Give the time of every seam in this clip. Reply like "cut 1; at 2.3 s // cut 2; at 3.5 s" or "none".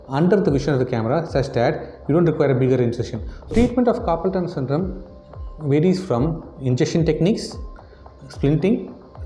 cut 1; at 3.5 s